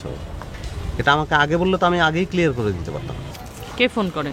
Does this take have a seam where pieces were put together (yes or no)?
no